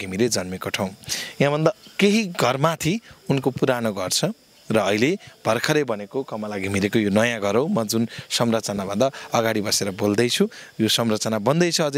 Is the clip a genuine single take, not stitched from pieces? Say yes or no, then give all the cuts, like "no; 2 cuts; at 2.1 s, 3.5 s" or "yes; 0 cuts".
yes; 0 cuts